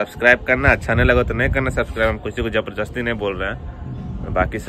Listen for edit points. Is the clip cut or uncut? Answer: uncut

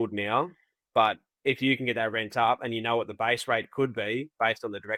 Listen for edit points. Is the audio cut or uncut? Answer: uncut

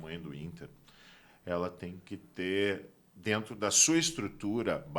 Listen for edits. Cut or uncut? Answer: uncut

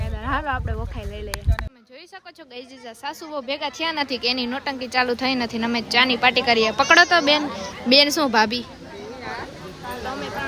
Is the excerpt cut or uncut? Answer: cut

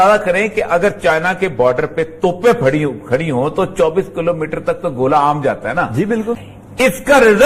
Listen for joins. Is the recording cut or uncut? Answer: uncut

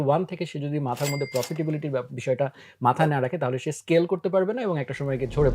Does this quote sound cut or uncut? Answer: uncut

